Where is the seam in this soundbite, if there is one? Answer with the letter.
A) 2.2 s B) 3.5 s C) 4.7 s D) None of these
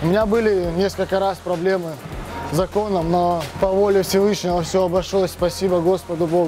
B